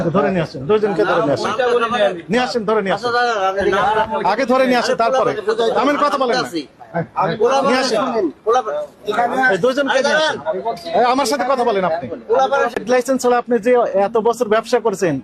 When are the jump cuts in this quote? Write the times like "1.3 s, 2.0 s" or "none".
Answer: 12.8 s